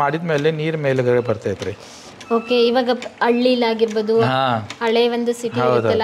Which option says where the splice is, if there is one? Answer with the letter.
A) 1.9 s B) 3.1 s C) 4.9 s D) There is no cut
D